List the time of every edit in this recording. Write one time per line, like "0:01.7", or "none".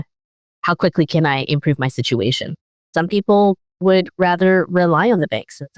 0:02.8
0:03.7